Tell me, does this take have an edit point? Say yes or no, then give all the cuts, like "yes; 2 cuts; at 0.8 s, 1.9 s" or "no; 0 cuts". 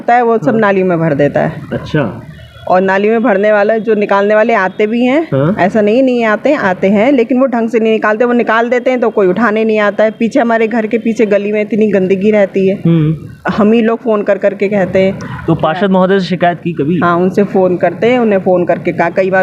no; 0 cuts